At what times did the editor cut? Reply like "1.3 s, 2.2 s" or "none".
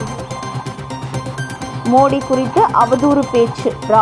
1.2 s